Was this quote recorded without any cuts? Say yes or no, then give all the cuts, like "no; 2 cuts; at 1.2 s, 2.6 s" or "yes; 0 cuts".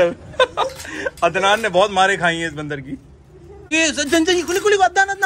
yes; 0 cuts